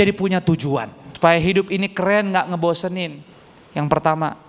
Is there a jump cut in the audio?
yes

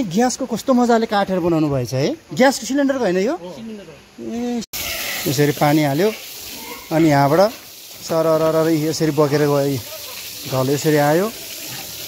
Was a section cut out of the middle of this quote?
yes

